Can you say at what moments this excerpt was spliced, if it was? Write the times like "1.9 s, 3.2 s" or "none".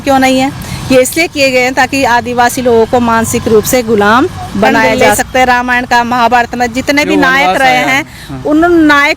5.2 s